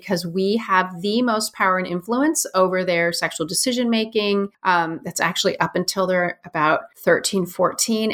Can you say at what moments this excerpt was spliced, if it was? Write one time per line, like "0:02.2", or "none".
0:04.5
0:06.9